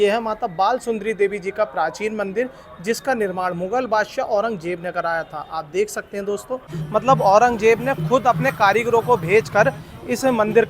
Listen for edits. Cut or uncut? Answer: cut